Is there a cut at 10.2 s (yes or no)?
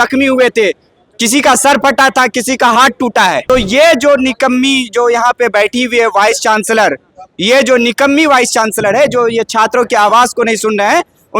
no